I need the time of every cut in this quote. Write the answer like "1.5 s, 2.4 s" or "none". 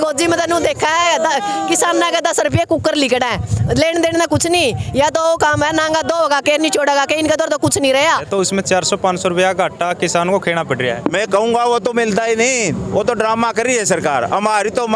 8.3 s